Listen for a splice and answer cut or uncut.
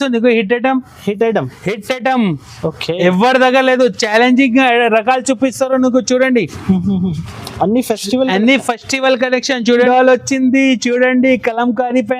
cut